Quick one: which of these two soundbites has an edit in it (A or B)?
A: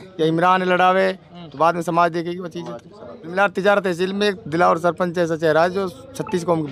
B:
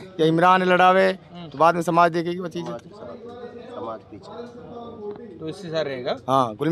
A